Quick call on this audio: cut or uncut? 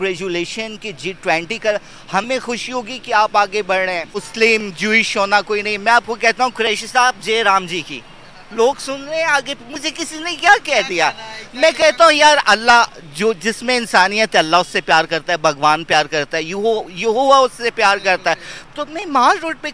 cut